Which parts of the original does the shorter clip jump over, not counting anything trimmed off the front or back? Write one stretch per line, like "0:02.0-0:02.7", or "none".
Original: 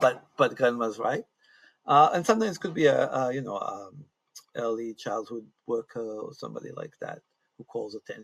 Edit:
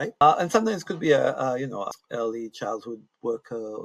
0:03.7-0:04.4